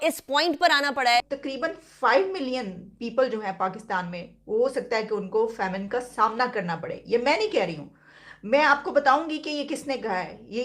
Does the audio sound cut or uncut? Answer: cut